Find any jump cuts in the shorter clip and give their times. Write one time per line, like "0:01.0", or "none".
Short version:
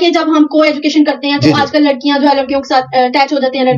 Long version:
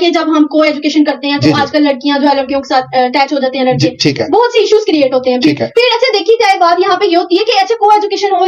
none